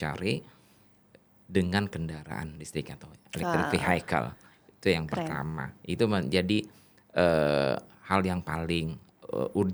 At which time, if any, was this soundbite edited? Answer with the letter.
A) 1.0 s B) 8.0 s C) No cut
C